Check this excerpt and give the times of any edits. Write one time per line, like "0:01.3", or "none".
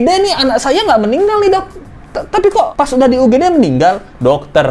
none